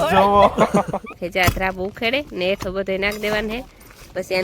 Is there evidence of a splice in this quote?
yes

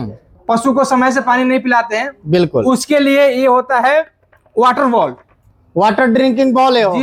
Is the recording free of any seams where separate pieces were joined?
yes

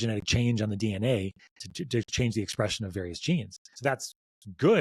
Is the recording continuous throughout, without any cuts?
no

